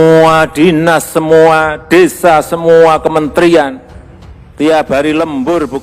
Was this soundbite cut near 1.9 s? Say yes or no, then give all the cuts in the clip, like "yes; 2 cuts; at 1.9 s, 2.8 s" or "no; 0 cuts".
no; 0 cuts